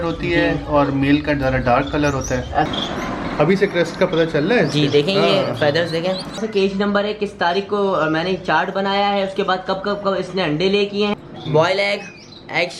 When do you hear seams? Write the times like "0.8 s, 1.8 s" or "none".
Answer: 2.7 s, 6.4 s, 11.1 s